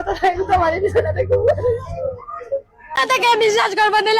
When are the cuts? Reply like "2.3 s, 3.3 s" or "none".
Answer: 3.0 s